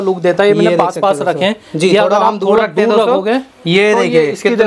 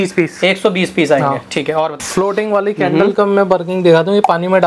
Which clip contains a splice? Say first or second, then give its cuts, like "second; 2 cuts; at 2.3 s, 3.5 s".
second; 1 cut; at 2.0 s